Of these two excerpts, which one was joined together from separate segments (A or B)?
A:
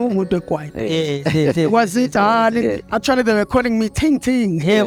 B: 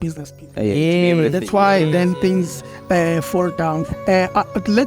B